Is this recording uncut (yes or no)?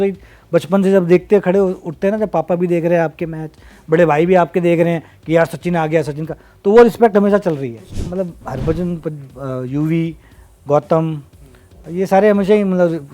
no